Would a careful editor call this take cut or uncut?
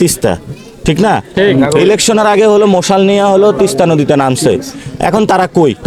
uncut